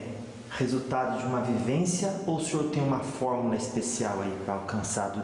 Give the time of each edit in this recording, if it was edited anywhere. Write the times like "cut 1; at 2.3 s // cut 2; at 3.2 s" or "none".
none